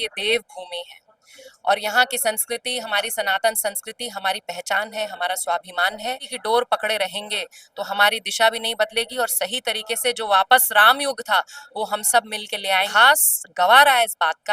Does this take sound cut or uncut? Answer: cut